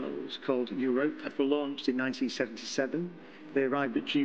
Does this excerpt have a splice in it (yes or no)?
yes